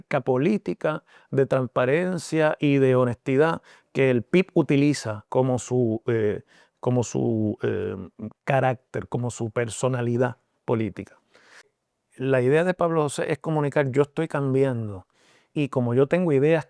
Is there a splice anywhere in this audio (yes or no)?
yes